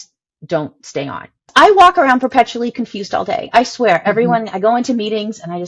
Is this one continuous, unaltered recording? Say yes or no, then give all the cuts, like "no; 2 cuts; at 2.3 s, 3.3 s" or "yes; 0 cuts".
no; 1 cut; at 1.5 s